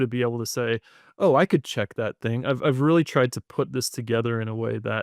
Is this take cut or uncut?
uncut